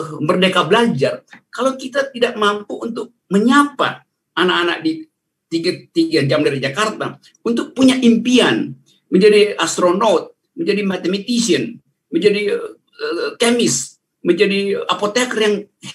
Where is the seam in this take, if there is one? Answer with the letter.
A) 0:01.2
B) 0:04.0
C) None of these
C